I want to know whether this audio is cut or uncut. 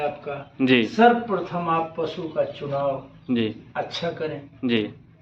uncut